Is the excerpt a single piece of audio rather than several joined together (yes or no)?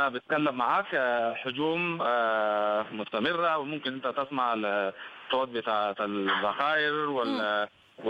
yes